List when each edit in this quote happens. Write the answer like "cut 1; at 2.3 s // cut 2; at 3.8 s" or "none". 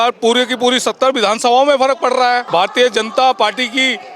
cut 1; at 2.4 s

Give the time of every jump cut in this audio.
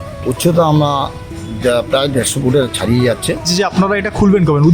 cut 1; at 3.5 s

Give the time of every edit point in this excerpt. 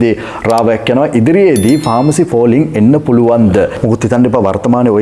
cut 1; at 3.8 s

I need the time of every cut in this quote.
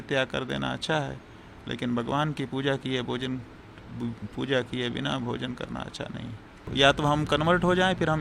cut 1; at 6.7 s

